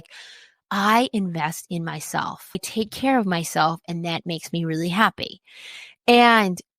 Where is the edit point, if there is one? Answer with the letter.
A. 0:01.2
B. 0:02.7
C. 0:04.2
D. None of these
B